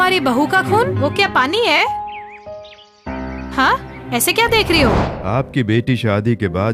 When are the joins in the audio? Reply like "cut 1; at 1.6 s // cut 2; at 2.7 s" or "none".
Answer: cut 1; at 5.1 s

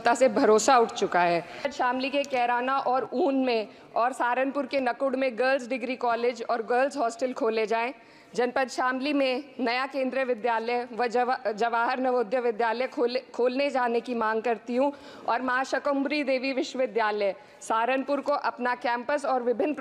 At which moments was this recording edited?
cut 1; at 1.7 s

